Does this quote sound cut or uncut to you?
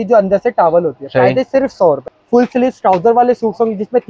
cut